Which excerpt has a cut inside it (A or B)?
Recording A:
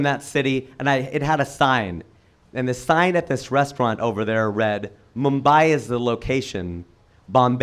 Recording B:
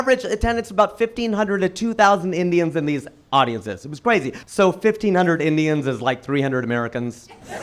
B